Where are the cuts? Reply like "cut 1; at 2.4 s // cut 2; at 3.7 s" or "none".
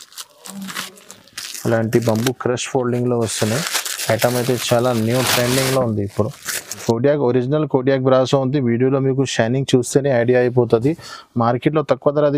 cut 1; at 6.8 s